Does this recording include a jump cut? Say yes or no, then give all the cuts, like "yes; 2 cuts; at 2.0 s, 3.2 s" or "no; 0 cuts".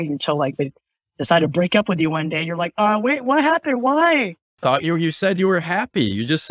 yes; 1 cut; at 4.5 s